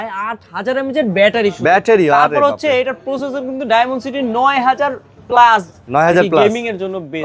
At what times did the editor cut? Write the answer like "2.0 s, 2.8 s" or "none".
none